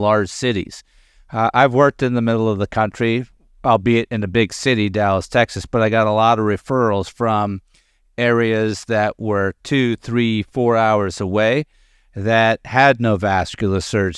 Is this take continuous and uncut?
yes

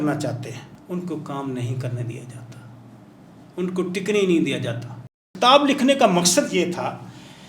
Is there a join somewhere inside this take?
yes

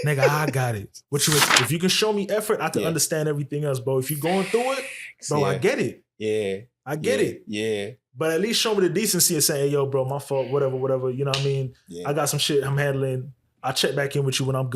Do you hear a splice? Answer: yes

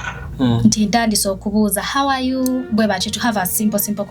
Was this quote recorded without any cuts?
yes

